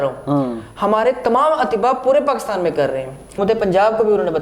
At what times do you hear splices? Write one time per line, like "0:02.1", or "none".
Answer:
0:03.4

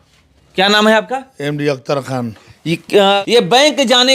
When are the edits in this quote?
0:03.2

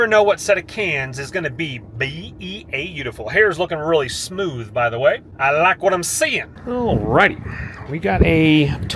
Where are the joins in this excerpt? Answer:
none

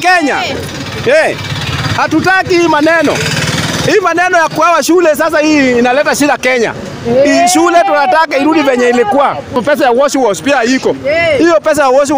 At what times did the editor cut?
0:09.6

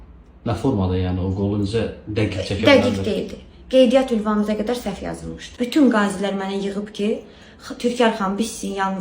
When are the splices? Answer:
0:05.5

